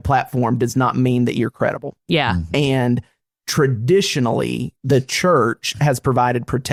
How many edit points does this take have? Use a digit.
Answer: 0